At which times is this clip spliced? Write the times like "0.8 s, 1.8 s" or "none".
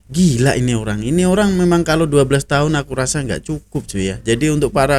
none